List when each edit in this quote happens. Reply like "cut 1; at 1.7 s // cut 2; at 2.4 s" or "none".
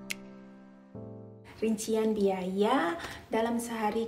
cut 1; at 1.4 s